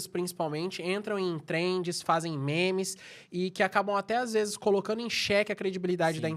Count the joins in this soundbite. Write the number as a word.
zero